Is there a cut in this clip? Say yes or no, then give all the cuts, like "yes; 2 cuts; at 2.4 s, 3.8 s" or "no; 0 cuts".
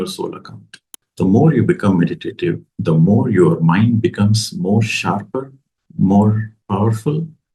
yes; 2 cuts; at 1.0 s, 6.5 s